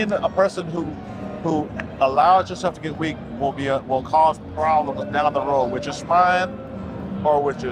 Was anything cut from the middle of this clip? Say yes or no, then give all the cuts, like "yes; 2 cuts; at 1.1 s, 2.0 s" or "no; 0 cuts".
no; 0 cuts